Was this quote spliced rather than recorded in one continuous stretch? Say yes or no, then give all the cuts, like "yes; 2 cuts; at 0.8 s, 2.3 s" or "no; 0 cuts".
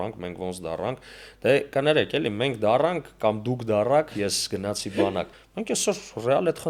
yes; 1 cut; at 5.4 s